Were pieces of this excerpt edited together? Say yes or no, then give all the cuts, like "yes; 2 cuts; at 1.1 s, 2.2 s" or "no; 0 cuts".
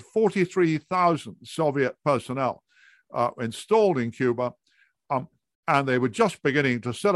no; 0 cuts